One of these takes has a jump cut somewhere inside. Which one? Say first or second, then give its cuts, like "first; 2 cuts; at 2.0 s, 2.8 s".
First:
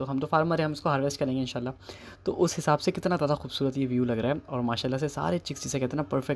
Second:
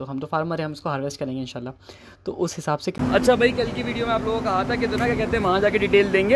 second; 1 cut; at 2.9 s